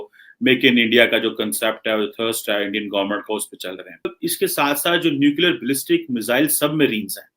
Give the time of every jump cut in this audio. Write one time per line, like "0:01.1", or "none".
0:04.1